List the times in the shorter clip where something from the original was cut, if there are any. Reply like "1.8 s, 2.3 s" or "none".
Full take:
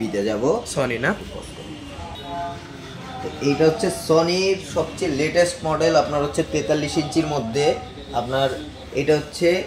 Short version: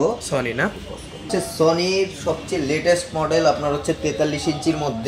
1.3 s